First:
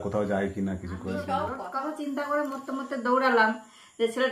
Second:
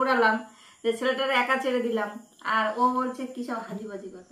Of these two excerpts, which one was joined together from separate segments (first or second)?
first